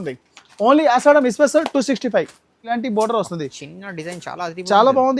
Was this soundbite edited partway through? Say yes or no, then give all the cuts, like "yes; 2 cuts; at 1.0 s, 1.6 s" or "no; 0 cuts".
yes; 1 cut; at 2.6 s